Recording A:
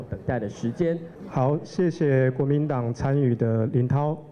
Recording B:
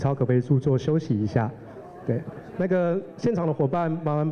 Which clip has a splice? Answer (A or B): A